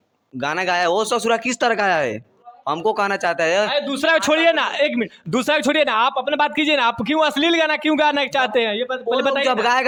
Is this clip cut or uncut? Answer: uncut